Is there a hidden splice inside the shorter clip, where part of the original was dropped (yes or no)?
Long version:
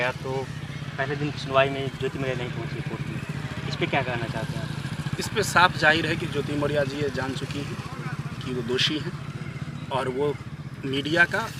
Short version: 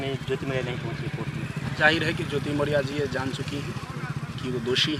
yes